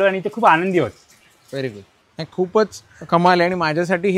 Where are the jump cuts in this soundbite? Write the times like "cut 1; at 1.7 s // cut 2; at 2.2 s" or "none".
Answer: none